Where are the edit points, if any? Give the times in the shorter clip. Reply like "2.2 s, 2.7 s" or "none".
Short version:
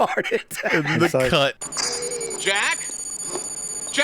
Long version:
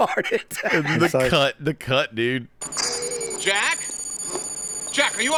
1.6 s